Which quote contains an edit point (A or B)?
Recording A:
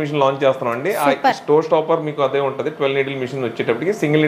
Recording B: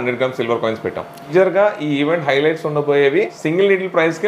B